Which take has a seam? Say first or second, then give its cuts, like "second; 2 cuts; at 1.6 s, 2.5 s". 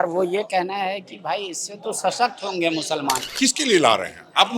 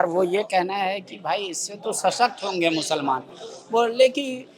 first; 1 cut; at 3.3 s